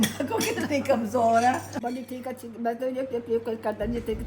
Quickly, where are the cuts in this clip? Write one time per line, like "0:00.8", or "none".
0:01.8